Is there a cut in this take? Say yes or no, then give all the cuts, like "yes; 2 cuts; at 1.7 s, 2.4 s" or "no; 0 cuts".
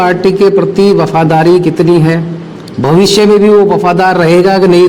no; 0 cuts